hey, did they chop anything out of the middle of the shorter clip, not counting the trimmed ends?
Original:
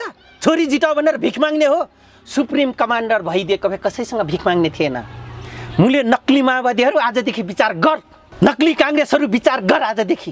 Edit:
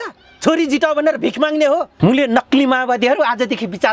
yes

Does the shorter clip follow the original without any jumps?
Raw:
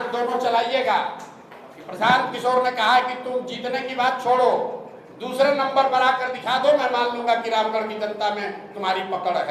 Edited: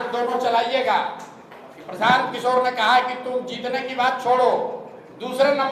yes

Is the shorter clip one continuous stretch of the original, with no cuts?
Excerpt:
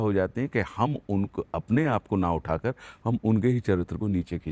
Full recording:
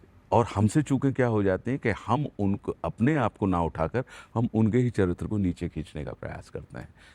yes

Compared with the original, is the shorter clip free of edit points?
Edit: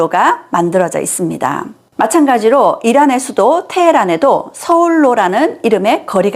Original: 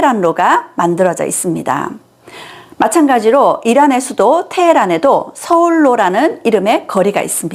no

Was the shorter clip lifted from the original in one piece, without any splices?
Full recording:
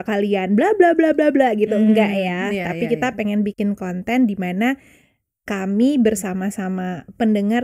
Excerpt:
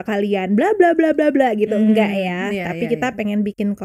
yes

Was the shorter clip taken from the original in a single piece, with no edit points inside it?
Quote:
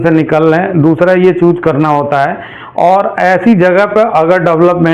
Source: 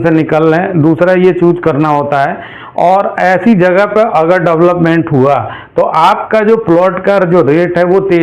yes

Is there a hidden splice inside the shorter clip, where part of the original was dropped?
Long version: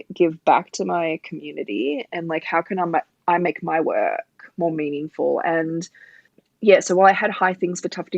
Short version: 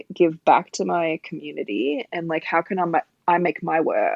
no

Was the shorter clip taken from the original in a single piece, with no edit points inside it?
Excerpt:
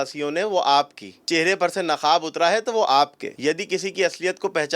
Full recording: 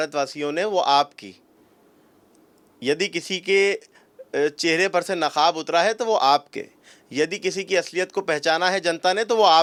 no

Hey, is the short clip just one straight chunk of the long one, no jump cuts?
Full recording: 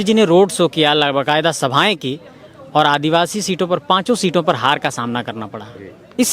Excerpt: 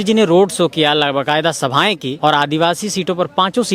no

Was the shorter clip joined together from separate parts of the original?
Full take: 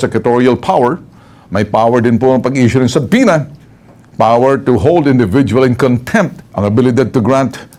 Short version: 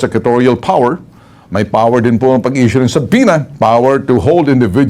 yes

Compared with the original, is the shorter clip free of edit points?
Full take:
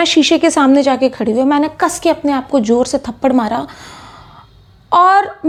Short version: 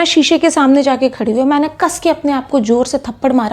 yes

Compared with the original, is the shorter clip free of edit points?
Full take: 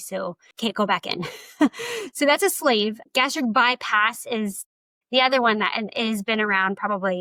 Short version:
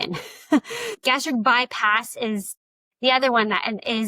no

